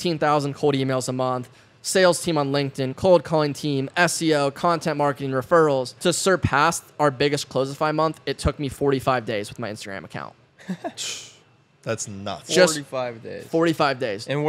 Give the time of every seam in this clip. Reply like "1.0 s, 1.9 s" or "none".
5.9 s